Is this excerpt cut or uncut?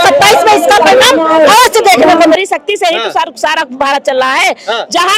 cut